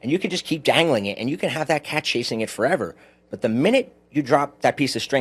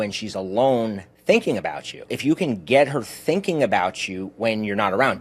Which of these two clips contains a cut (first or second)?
second